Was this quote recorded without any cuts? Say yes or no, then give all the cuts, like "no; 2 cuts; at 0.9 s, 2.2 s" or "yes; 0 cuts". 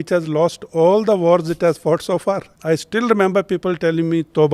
no; 1 cut; at 2.5 s